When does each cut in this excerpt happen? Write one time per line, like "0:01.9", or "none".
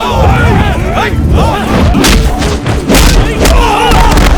0:01.9